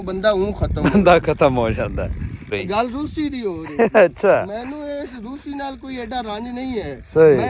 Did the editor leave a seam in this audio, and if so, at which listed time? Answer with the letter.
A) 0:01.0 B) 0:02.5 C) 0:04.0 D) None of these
B